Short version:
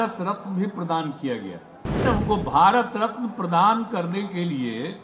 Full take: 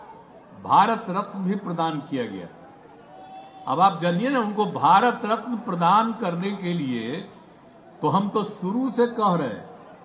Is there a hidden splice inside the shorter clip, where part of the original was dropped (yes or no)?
yes